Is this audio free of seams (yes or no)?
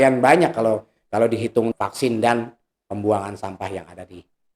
no